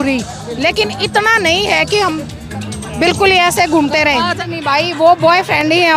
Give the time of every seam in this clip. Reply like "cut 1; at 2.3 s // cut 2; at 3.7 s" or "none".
cut 1; at 4.4 s